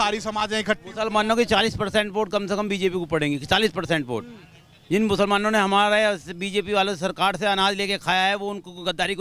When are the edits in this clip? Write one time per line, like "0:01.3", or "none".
none